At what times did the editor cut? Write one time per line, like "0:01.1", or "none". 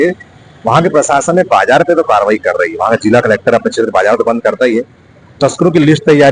none